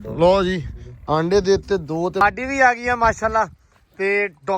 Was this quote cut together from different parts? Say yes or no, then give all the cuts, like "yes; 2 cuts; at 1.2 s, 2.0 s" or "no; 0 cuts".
yes; 1 cut; at 2.2 s